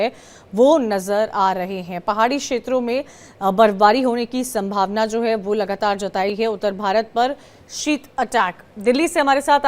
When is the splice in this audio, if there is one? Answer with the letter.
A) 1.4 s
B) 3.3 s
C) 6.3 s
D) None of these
C